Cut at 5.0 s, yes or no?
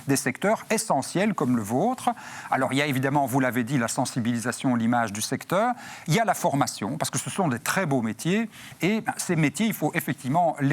no